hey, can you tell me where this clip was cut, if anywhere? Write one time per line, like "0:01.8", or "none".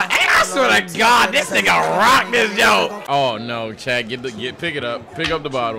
0:03.0